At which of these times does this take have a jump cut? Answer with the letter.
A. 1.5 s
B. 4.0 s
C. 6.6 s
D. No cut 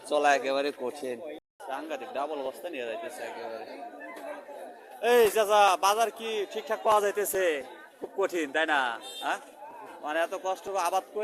A